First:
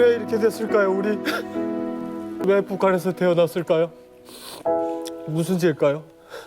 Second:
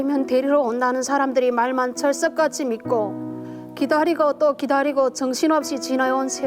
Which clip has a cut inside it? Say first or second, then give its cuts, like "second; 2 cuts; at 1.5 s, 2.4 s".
first; 1 cut; at 2.4 s